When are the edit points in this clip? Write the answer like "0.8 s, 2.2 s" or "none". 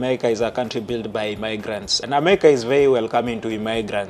2.0 s